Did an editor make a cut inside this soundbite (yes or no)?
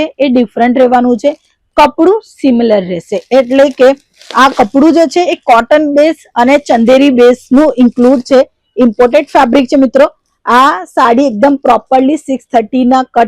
no